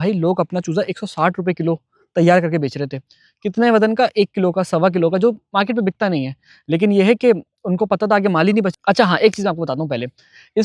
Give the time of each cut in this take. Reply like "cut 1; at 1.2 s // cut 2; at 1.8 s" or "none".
cut 1; at 8.7 s